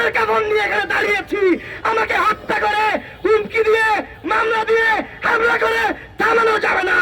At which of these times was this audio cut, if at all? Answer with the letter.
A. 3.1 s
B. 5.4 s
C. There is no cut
C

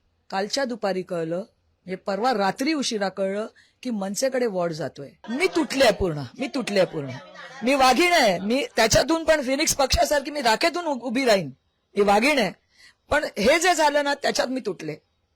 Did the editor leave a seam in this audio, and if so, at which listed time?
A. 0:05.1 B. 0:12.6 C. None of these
A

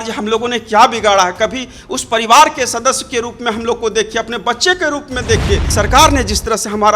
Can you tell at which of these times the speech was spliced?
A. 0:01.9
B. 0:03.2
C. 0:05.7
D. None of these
C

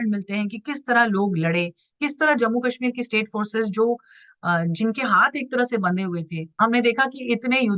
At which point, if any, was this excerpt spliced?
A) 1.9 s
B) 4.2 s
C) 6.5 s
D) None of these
C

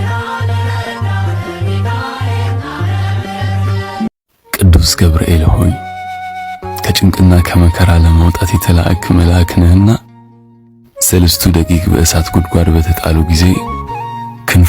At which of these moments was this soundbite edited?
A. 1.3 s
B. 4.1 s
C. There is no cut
B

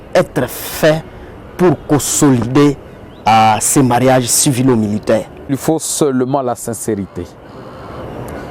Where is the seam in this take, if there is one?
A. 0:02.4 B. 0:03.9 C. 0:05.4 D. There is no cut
C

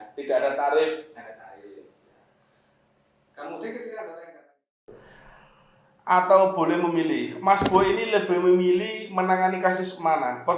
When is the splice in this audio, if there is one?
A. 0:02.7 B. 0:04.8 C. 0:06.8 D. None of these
B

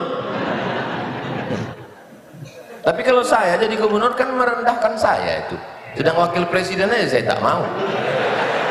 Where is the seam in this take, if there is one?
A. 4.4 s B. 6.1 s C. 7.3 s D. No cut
D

